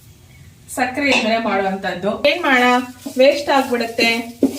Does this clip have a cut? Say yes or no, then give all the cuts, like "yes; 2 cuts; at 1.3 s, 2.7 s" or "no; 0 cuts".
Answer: yes; 1 cut; at 2.2 s